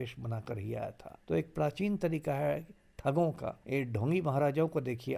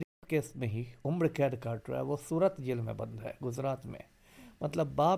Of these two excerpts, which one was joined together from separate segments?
first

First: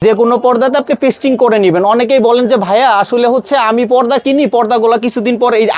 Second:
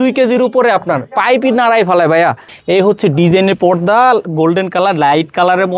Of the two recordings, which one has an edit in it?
second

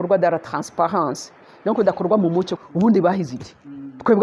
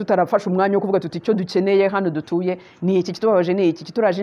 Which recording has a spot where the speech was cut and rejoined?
first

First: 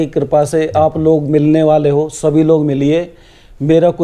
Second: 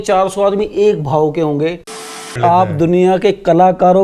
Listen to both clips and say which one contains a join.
second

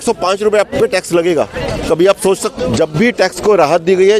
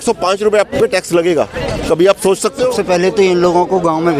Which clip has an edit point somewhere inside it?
second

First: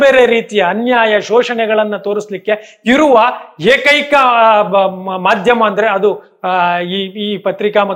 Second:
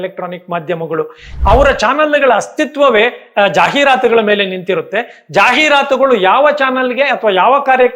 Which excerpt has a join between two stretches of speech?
second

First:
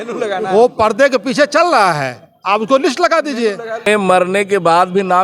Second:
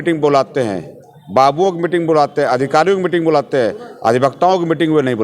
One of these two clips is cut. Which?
first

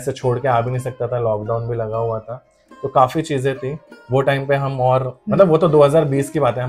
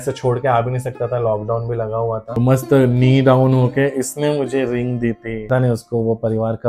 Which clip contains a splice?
second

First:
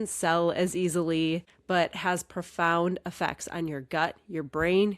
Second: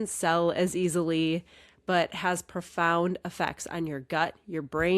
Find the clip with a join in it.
first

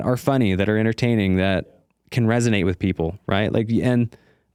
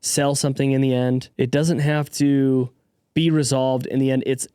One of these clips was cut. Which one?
second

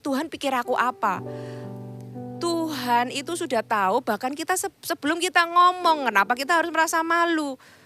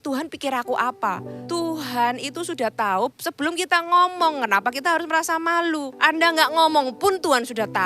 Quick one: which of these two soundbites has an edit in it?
second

